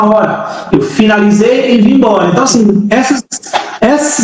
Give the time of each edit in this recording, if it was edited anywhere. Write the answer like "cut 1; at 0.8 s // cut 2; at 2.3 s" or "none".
none